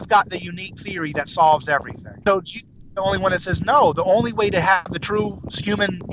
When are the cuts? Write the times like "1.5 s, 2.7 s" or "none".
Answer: 2.2 s